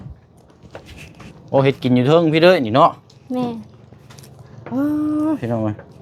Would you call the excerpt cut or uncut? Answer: uncut